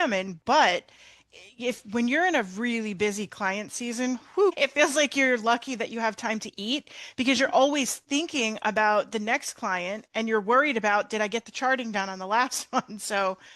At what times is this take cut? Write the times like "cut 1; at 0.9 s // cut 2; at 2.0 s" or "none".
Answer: cut 1; at 4.6 s